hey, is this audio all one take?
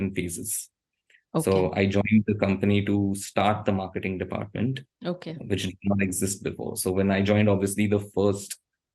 yes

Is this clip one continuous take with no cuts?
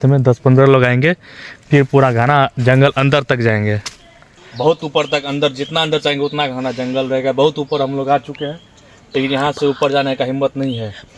no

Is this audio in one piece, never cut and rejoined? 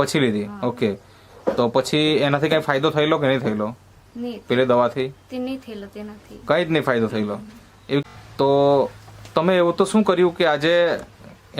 no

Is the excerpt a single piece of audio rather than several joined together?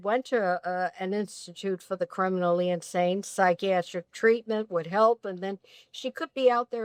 yes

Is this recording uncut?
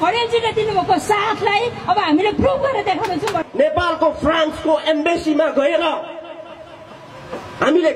no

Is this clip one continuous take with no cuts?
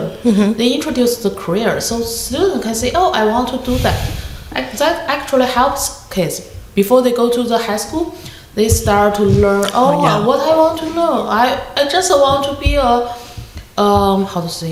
yes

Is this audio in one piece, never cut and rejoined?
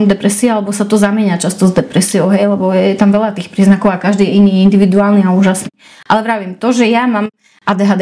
yes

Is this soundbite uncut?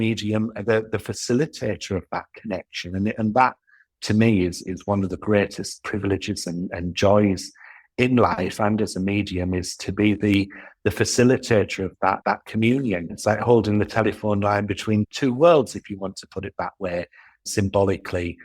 no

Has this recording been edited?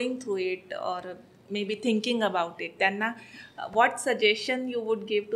no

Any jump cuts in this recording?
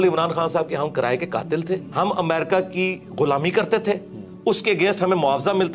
yes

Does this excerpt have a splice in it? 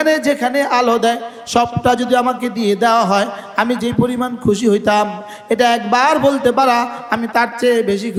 no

